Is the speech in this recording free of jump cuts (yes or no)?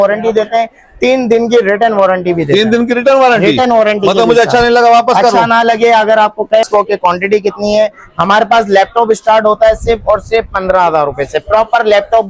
no